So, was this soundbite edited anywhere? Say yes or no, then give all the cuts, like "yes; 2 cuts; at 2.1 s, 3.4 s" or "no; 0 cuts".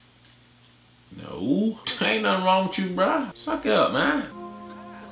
yes; 4 cuts; at 1.1 s, 1.9 s, 3.4 s, 4.3 s